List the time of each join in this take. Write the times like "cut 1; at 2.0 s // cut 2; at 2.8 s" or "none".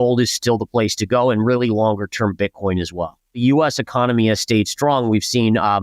cut 1; at 3.4 s